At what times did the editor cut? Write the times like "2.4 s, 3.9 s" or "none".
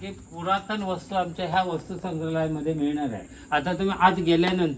none